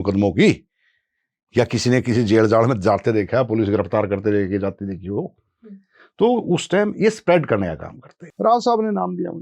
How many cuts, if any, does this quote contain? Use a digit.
1